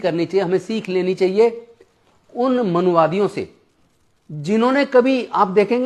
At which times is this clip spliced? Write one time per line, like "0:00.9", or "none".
none